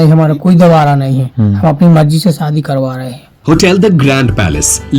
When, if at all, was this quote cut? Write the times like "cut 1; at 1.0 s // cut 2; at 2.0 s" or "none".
cut 1; at 3.3 s